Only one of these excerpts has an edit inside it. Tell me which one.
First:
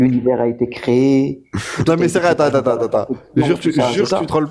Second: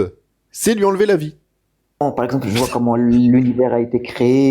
second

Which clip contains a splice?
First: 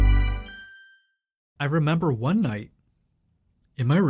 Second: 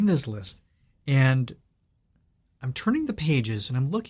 first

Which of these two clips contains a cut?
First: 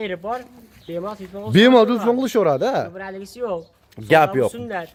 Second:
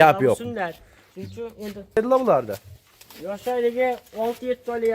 second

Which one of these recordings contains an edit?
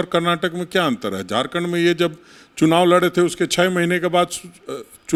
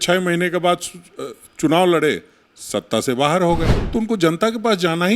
second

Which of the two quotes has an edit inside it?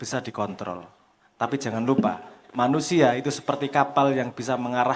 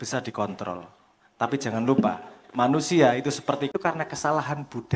second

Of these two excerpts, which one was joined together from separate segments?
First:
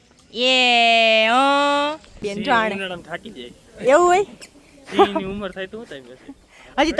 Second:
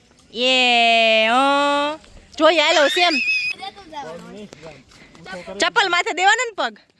first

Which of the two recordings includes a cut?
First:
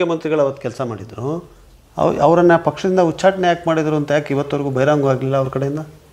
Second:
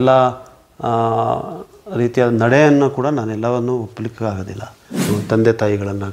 second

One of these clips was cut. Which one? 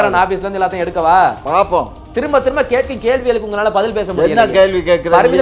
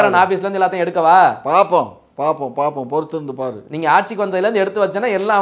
first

